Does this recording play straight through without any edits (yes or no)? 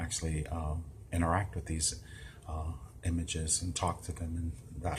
yes